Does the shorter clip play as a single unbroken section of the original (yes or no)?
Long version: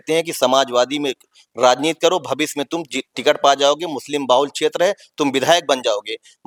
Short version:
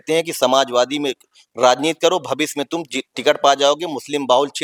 yes